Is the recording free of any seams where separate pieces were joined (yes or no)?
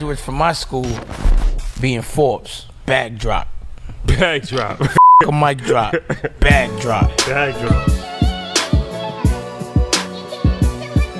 yes